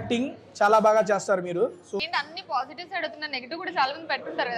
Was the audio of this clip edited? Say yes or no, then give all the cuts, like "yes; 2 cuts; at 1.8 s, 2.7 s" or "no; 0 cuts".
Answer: yes; 1 cut; at 2.0 s